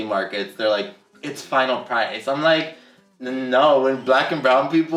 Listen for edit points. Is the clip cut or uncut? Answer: uncut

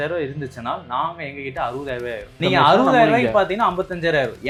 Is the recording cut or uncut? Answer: uncut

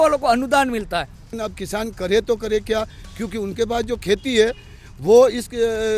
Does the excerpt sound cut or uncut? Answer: cut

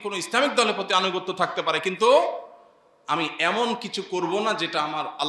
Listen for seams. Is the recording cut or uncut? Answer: uncut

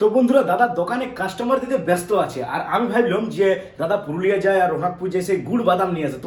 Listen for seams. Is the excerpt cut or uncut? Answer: uncut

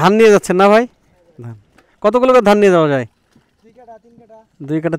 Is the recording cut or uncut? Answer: uncut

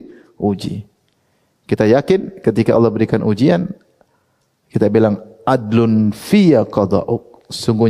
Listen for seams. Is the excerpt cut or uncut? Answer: uncut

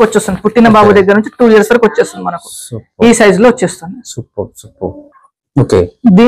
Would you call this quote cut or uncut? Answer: uncut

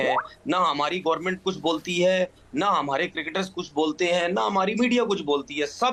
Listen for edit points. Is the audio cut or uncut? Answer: uncut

